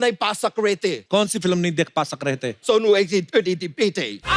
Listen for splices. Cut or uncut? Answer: cut